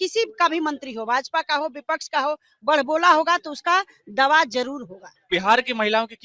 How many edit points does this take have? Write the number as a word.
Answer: one